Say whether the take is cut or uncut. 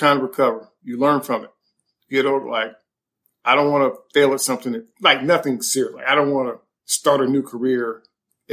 uncut